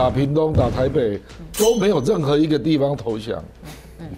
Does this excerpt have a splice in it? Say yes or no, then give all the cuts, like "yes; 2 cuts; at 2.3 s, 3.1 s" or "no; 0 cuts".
no; 0 cuts